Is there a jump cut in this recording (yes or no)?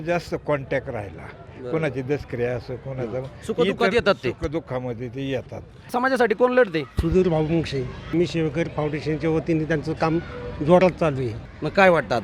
yes